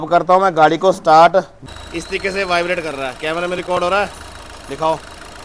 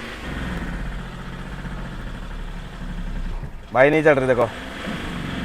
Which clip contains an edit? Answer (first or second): first